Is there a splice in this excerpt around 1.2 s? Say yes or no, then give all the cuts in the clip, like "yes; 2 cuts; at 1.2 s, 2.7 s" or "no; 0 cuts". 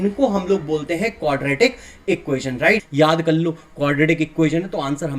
no; 1 cut; at 2.9 s